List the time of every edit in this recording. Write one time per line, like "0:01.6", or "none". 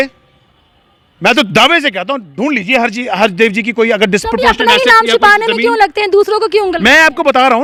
none